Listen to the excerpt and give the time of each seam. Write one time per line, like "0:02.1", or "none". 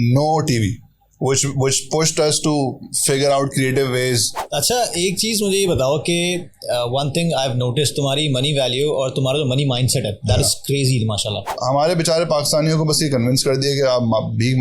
0:04.4
0:11.5